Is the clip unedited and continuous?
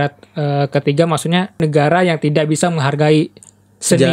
no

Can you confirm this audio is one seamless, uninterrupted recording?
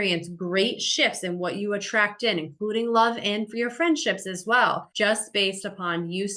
no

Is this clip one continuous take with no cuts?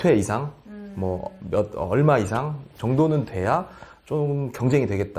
yes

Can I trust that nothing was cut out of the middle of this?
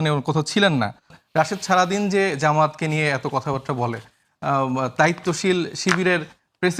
no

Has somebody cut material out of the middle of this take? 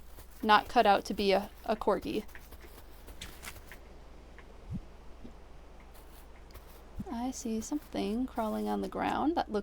yes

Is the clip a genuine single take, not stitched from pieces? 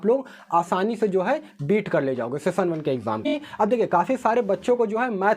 no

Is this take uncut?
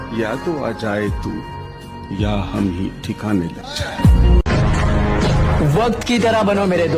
no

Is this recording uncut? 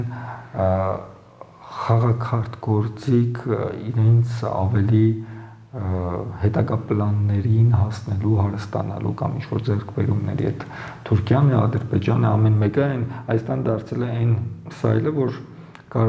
yes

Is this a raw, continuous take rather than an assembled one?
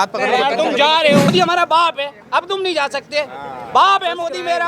no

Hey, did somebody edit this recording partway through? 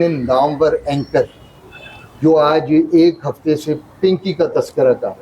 no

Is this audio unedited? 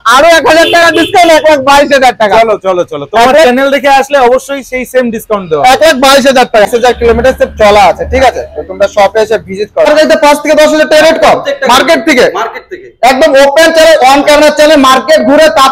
no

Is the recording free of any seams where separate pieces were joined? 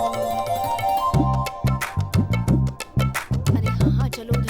no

